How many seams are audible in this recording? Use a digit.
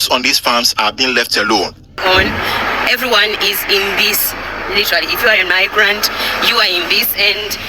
1